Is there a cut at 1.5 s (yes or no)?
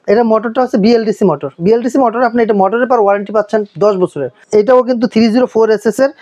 no